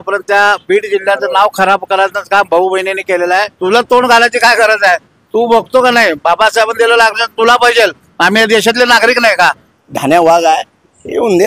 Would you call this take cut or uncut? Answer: cut